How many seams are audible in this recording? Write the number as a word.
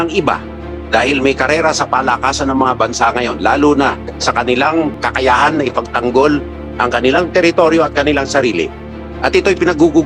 zero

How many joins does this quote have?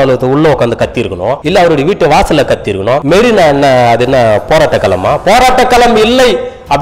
two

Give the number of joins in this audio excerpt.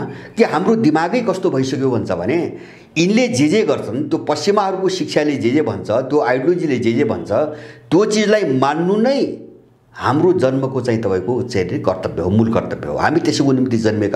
zero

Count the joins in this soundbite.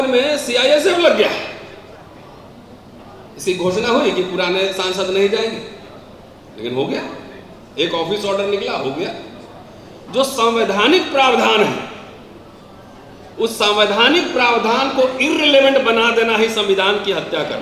zero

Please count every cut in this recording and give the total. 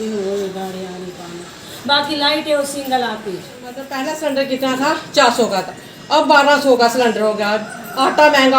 one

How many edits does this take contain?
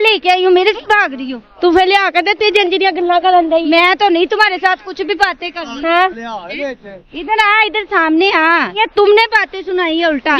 one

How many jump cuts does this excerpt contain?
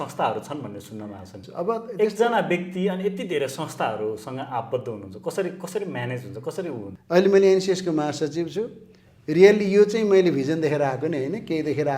two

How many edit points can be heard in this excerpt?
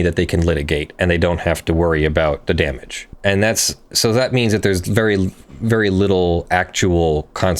one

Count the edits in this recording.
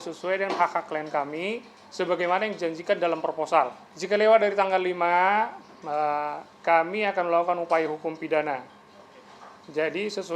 one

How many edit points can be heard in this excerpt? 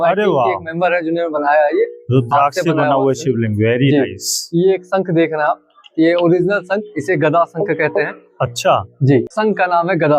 zero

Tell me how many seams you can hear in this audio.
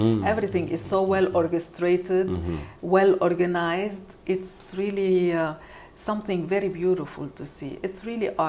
zero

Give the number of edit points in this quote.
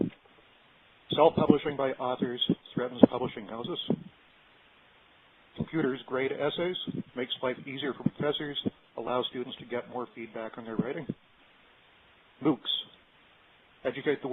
one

